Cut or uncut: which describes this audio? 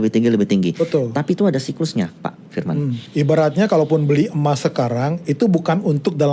cut